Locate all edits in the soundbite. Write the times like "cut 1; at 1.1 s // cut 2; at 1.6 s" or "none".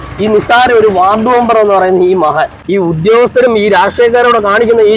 cut 1; at 2.6 s